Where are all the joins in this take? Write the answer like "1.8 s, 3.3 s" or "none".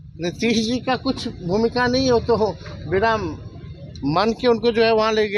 none